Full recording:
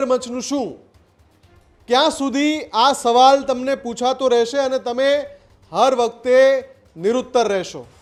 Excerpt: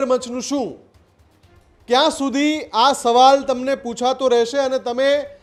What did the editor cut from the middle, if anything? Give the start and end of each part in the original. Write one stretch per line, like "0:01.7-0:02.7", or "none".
none

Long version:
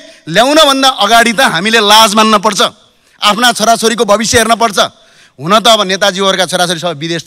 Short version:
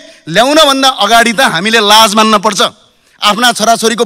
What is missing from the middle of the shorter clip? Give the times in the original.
none

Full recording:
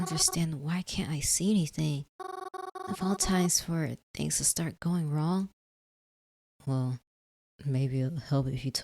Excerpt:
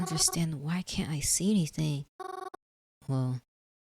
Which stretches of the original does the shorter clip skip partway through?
0:02.5-0:06.1

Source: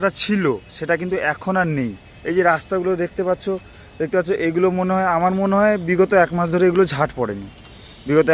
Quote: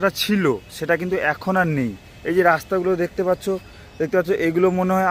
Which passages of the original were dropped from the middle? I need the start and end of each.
none

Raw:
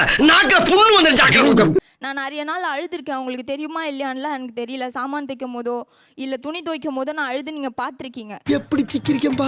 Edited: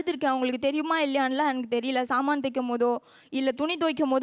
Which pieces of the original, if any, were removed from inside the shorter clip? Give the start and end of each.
none

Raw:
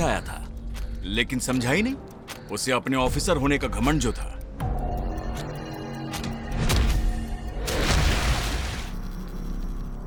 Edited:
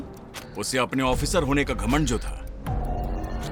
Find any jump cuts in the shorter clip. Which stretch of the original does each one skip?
none

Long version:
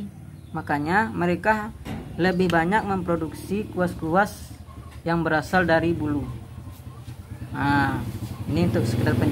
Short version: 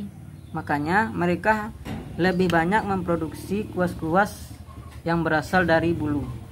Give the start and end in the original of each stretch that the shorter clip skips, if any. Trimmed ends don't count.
none

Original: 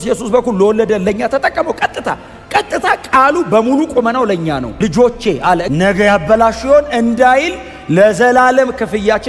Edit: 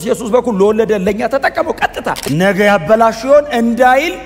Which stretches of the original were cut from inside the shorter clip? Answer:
0:02.3-0:05.7

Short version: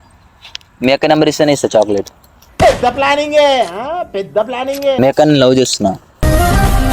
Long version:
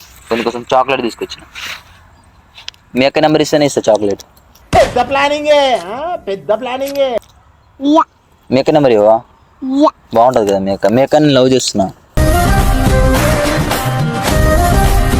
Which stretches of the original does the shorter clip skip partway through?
0:07.1-0:10.9

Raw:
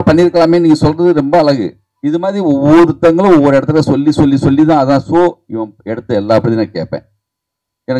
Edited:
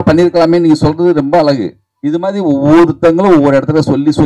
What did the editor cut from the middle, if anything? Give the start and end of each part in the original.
none

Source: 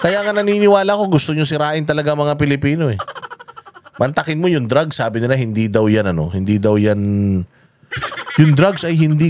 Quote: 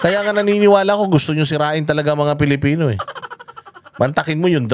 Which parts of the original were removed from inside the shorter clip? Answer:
none

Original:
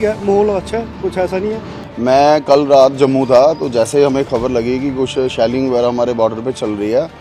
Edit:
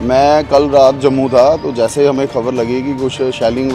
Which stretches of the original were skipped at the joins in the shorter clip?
none

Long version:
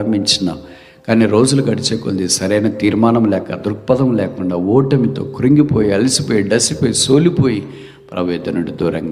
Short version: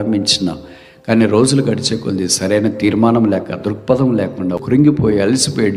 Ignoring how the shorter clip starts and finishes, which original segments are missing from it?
0:04.6-0:05.3

